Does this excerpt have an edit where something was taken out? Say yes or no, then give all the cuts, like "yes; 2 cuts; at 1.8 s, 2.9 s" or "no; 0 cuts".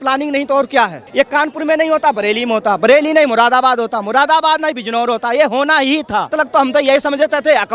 yes; 2 cuts; at 1.0 s, 6.3 s